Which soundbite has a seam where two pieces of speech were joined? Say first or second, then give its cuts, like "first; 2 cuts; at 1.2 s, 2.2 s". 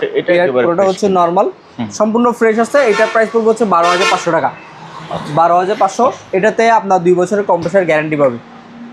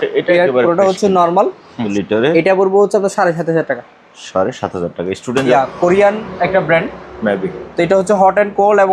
second; 2 cuts; at 1.8 s, 5.5 s